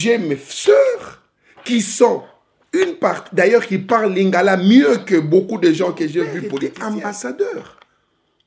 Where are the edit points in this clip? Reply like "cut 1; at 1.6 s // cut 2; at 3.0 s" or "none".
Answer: cut 1; at 6.5 s

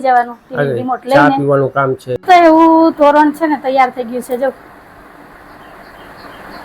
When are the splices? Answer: cut 1; at 2.2 s

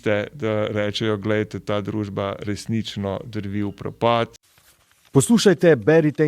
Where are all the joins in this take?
cut 1; at 4.4 s

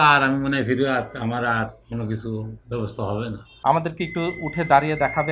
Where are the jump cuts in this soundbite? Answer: cut 1; at 3.5 s

